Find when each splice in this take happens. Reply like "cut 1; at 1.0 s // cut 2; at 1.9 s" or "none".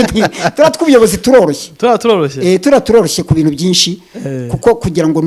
none